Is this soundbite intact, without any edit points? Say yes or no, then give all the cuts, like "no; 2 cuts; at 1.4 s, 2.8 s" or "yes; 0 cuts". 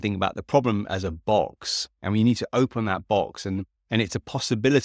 yes; 0 cuts